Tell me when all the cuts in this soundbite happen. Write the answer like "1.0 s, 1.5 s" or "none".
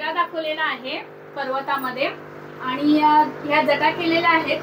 none